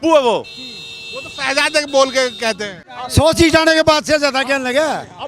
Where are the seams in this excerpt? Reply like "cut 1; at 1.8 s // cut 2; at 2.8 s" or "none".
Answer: cut 1; at 2.7 s